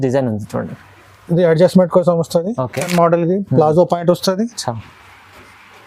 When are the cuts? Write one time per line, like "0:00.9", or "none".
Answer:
0:02.9